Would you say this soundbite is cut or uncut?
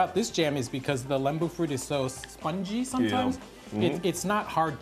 uncut